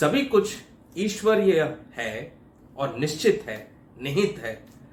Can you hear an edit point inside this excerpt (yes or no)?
no